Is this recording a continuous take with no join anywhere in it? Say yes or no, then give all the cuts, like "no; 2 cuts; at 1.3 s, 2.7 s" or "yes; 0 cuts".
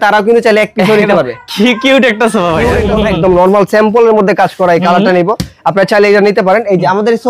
no; 1 cut; at 2.9 s